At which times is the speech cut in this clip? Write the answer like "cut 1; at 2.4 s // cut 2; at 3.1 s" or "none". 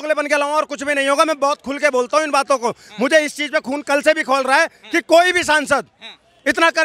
none